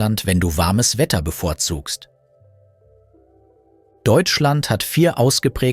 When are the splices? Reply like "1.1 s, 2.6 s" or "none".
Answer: 2.2 s, 4.0 s